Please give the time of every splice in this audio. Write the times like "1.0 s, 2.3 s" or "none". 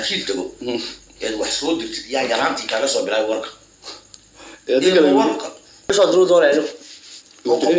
5.9 s